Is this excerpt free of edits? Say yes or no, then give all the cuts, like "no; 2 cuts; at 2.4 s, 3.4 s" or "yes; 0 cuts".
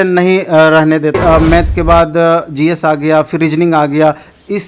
no; 1 cut; at 1.2 s